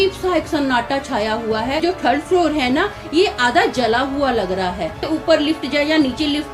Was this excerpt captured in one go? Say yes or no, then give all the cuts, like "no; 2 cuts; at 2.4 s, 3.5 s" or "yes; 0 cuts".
no; 2 cuts; at 1.8 s, 5.1 s